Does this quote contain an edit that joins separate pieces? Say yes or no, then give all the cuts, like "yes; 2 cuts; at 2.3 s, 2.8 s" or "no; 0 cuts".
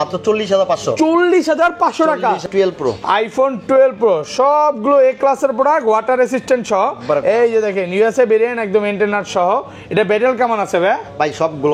yes; 1 cut; at 2.4 s